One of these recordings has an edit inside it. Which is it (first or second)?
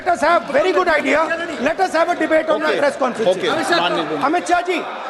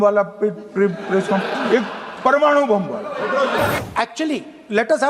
second